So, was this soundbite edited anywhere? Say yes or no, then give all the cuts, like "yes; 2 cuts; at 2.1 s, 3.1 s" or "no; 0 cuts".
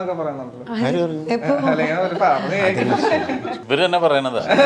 yes; 1 cut; at 3.6 s